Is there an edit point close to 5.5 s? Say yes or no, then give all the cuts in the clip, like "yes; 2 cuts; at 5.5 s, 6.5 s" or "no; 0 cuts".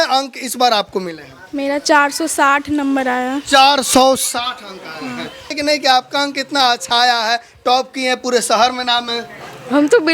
yes; 1 cut; at 5.5 s